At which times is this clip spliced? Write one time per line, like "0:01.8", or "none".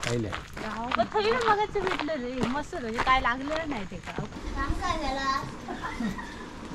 0:04.3